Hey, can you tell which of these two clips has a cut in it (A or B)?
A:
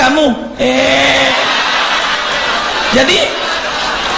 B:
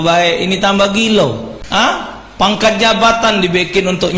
B